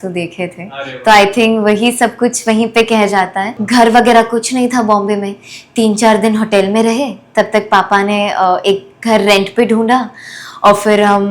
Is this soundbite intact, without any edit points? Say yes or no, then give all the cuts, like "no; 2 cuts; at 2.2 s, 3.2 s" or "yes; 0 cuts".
no; 1 cut; at 3.6 s